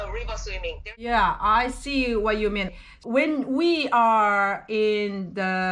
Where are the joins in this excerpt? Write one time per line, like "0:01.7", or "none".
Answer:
0:00.9

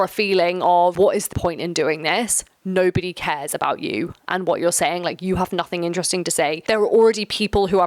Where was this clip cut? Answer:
0:01.3
0:06.6

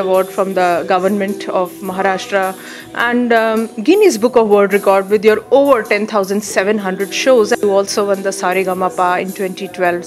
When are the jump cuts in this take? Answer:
0:07.6

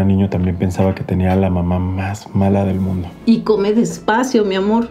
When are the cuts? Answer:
0:03.1

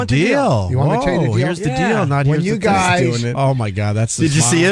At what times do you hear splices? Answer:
0:01.8

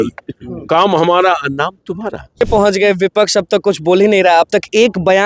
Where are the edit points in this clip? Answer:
0:02.4

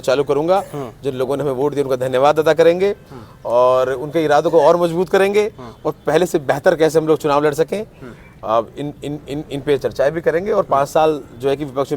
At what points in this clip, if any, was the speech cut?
none

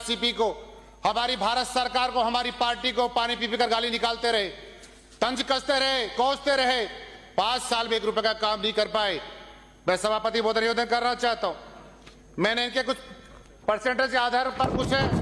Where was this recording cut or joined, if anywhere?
none

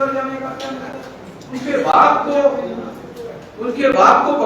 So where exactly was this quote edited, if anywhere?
0:01.3

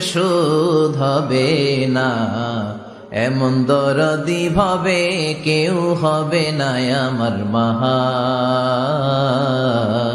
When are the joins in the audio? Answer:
none

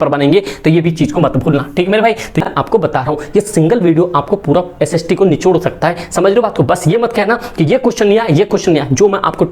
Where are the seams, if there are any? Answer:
0:02.5

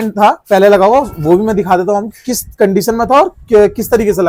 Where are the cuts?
none

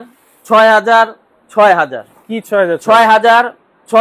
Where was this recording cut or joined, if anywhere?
none

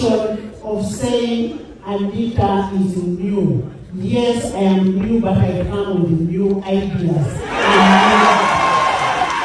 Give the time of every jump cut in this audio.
none

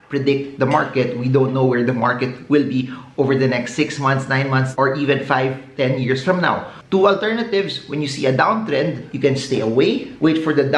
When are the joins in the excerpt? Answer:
0:06.7

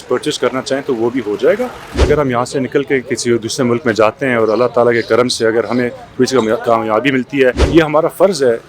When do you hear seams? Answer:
0:02.0
0:07.7

